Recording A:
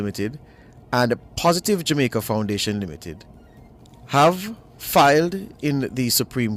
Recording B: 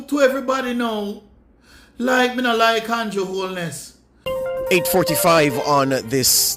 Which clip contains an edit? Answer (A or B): B